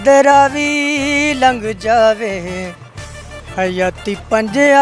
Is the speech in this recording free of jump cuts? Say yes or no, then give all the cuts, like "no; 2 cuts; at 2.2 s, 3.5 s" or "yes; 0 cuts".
yes; 0 cuts